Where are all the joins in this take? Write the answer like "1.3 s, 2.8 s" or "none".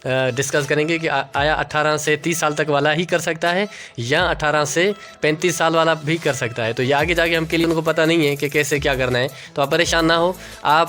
7.6 s